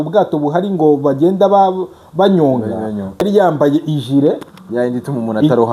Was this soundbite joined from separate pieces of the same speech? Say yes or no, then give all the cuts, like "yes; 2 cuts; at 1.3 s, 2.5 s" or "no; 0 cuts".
yes; 1 cut; at 3.2 s